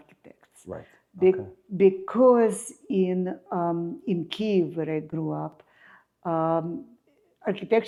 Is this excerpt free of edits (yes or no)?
yes